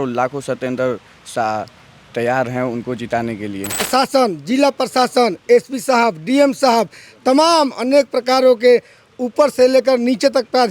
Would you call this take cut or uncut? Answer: cut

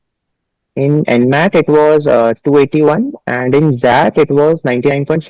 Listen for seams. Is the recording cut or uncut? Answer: uncut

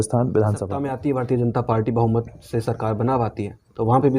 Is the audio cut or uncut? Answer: cut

